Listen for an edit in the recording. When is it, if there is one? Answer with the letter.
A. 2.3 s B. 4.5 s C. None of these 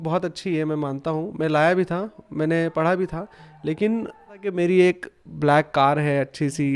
B